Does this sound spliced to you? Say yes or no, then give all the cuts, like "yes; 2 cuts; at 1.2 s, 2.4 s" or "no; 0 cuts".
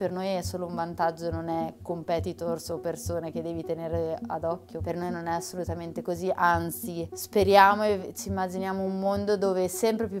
yes; 1 cut; at 4.7 s